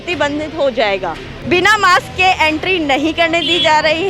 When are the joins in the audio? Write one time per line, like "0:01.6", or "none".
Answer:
0:01.3